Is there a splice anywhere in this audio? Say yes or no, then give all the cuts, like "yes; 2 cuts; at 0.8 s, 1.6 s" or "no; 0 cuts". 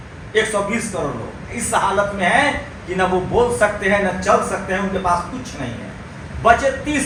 no; 0 cuts